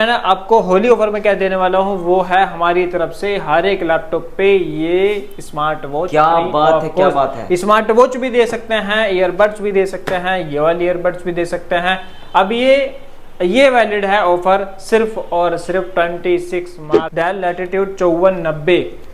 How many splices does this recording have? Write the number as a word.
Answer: one